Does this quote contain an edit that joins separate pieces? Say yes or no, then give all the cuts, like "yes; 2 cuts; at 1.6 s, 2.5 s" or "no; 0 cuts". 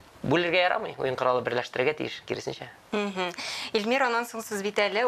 no; 0 cuts